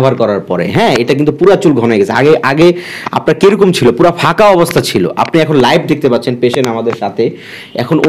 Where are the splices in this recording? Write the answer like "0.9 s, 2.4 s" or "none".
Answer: none